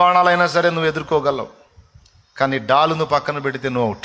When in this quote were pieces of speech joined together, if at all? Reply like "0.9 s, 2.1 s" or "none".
none